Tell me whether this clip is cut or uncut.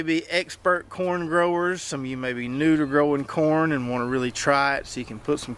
uncut